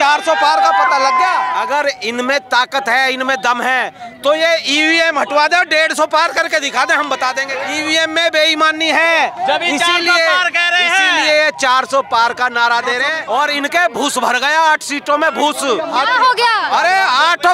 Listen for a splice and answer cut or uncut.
cut